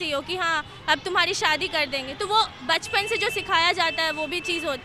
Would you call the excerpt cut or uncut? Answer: uncut